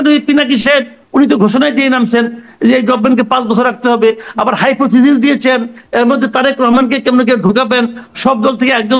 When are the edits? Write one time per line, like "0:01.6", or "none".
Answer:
none